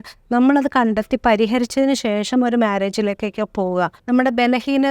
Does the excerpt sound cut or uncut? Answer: cut